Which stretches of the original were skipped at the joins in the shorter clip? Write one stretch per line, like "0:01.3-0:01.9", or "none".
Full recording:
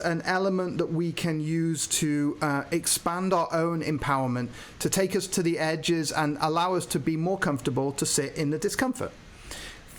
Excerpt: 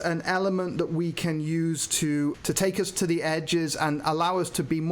0:02.4-0:04.7